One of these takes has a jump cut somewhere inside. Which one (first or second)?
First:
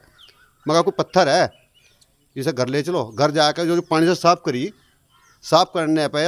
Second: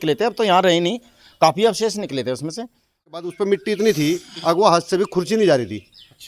second